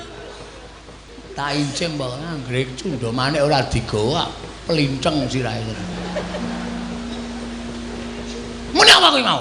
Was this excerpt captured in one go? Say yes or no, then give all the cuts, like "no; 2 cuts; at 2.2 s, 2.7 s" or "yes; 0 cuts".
no; 2 cuts; at 1.1 s, 5.9 s